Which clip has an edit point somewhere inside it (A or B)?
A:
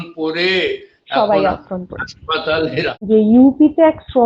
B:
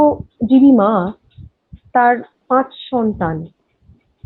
A